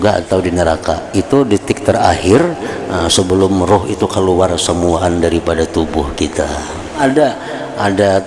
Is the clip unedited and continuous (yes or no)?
no